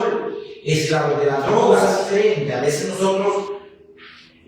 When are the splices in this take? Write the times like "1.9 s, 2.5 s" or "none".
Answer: 2.0 s